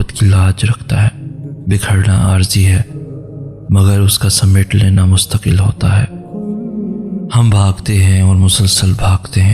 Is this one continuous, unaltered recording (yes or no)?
no